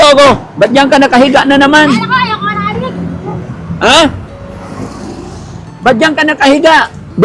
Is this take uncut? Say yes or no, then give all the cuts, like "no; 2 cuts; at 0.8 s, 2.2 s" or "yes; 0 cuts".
yes; 0 cuts